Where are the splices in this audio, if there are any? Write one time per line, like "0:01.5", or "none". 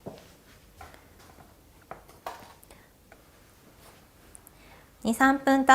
0:03.4